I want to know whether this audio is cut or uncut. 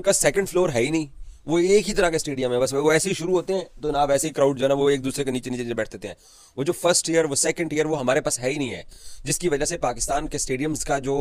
uncut